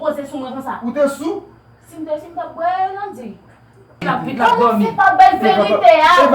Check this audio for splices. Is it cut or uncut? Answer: cut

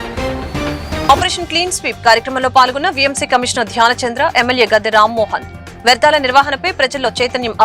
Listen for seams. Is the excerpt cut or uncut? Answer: cut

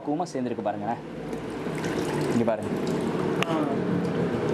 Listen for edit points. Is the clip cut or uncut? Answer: uncut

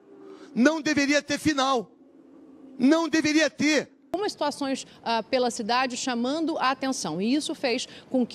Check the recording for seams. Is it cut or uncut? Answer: cut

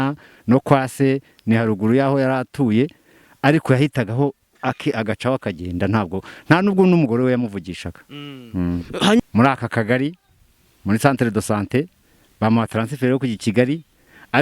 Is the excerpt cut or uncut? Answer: cut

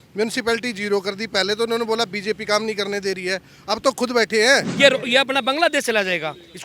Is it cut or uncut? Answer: cut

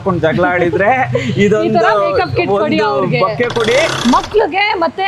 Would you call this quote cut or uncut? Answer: cut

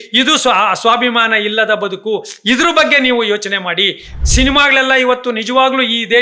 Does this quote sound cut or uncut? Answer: cut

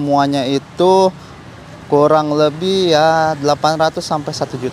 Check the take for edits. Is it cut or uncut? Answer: uncut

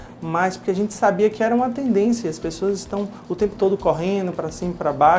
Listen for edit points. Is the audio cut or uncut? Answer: uncut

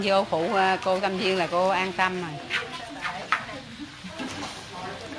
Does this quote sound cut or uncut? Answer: uncut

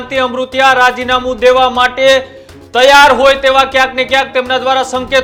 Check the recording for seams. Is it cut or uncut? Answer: uncut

